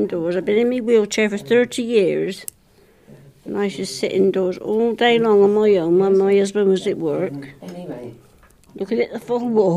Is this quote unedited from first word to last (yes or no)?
yes